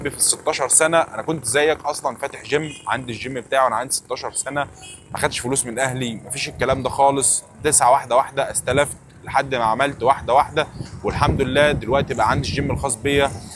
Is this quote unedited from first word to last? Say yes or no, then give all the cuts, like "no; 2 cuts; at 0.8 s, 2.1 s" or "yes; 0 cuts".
yes; 0 cuts